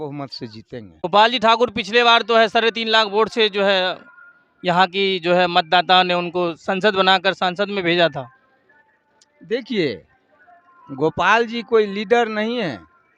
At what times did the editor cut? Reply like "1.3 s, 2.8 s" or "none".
1.0 s